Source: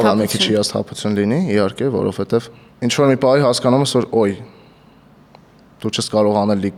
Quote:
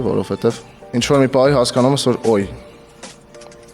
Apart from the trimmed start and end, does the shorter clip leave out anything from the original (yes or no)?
no